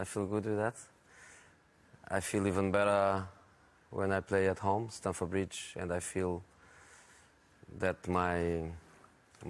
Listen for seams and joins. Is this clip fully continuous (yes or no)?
no